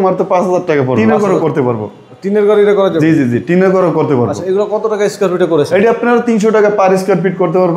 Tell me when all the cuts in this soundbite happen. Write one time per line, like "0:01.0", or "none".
0:01.0